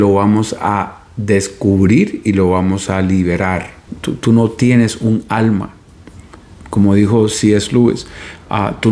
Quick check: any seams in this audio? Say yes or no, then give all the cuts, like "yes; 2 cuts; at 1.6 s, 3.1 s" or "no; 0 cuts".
yes; 1 cut; at 3.9 s